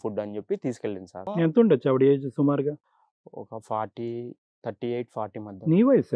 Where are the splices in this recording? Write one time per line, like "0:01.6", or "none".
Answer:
0:01.3